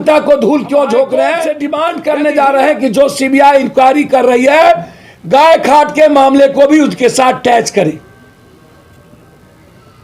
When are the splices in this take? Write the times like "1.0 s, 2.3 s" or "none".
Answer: 1.5 s